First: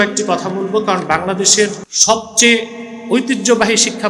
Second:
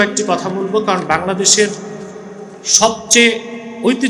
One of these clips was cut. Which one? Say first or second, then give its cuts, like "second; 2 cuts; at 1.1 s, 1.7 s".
first; 1 cut; at 1.9 s